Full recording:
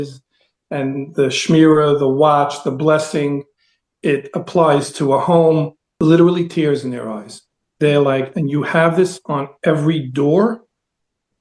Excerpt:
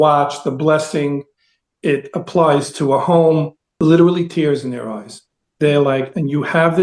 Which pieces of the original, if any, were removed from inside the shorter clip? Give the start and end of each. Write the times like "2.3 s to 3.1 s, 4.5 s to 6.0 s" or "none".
none